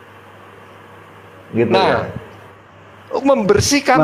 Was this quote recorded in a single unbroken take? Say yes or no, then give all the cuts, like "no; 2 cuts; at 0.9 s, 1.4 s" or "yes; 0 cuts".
yes; 0 cuts